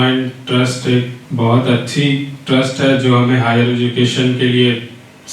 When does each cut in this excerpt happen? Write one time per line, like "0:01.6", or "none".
0:01.2